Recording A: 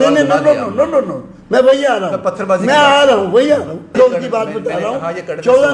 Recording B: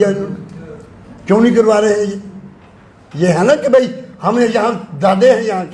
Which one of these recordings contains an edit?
A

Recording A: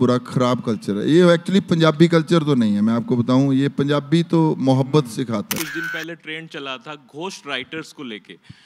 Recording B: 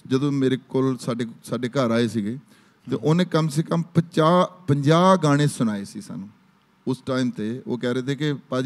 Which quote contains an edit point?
A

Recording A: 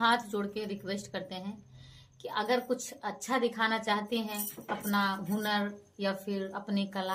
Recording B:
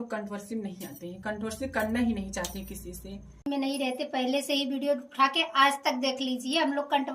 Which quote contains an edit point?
B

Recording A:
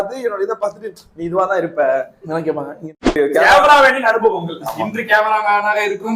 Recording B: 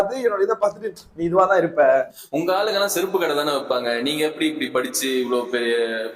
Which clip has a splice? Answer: B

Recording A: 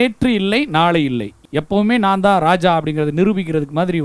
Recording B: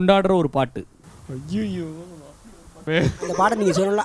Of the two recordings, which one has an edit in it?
B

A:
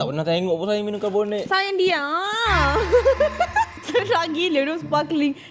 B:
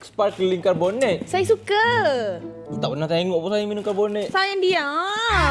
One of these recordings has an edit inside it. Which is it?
A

